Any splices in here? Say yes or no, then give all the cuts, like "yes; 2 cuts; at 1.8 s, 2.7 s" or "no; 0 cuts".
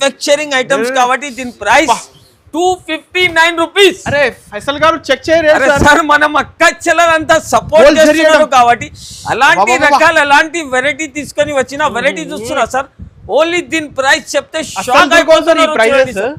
no; 0 cuts